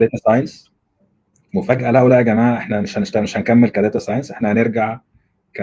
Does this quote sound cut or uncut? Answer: uncut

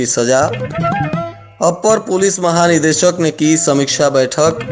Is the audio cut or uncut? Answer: uncut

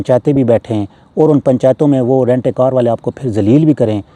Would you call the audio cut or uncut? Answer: uncut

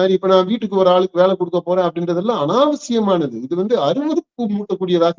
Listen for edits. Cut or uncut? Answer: uncut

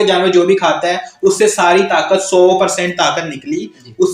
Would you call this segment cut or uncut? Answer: uncut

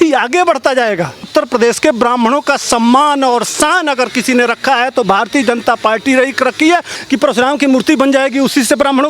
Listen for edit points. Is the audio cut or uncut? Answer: cut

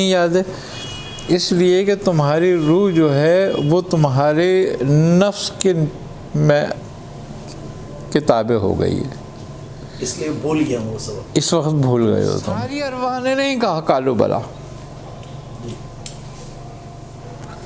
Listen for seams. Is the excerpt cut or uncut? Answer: cut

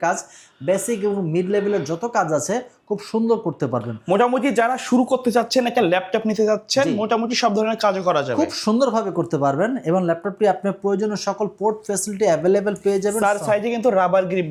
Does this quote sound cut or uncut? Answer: uncut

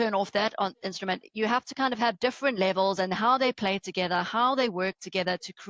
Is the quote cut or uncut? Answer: uncut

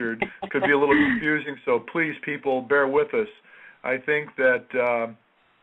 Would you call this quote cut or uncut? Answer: cut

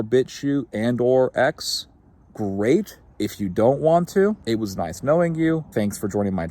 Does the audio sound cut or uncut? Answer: cut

